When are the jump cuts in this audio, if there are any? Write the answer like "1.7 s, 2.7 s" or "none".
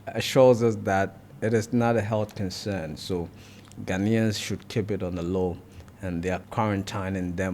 none

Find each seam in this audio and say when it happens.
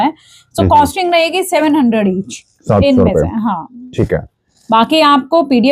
none

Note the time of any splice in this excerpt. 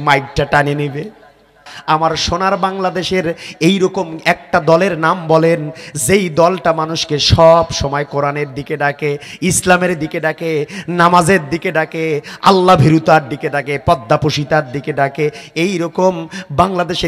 1.5 s

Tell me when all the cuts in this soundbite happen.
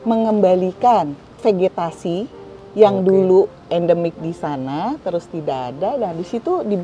1.4 s

